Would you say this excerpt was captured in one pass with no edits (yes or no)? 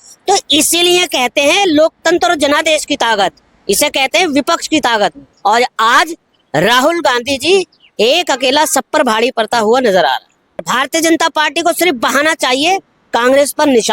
no